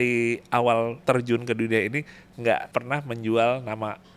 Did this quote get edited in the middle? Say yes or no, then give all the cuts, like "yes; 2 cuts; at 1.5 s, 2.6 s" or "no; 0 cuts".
yes; 2 cuts; at 1.0 s, 2.7 s